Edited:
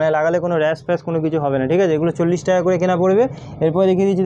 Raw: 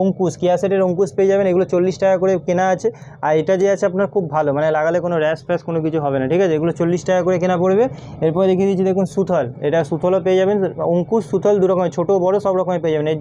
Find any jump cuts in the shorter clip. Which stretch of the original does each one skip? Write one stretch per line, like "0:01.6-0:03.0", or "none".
none